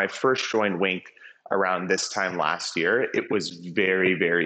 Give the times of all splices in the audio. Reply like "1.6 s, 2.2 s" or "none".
none